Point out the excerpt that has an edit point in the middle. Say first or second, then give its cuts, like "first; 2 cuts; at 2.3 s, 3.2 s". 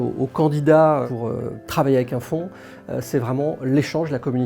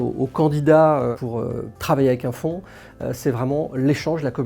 first; 1 cut; at 1.1 s